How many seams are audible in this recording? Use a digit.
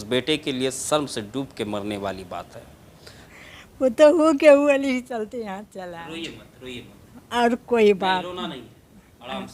1